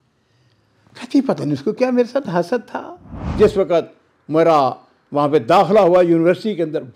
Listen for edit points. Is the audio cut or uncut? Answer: cut